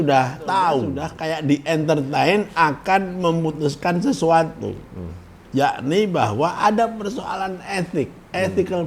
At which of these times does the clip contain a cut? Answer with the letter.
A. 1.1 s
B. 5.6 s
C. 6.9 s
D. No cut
A